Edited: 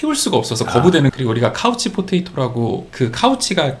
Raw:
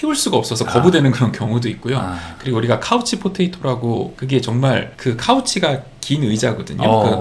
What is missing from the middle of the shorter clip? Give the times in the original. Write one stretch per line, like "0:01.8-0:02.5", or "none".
0:01.1-0:02.4
0:04.1-0:04.9